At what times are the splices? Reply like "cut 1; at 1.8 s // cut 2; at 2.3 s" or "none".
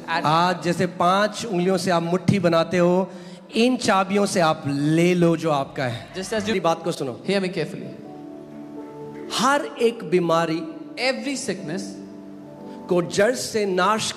cut 1; at 6.5 s